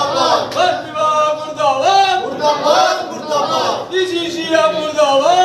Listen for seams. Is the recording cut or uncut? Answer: uncut